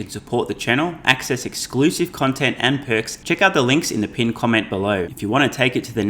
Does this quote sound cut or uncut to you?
cut